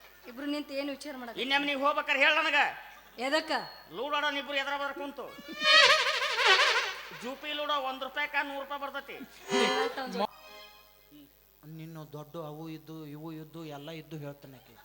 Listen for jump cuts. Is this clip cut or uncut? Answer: cut